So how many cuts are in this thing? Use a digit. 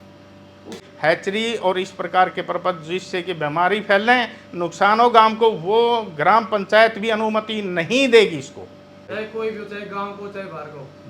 2